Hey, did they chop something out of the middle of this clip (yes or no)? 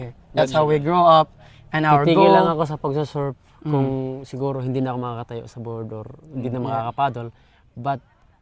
no